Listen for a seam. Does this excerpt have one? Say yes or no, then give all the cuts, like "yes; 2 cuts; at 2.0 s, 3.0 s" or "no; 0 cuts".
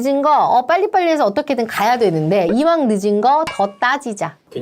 no; 0 cuts